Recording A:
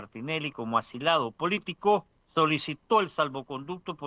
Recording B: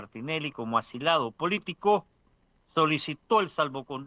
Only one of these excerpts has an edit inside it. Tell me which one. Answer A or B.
A